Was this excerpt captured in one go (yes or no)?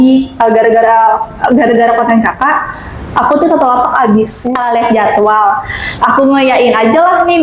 no